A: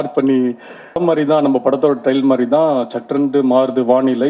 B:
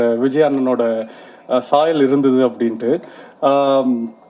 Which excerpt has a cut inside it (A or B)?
A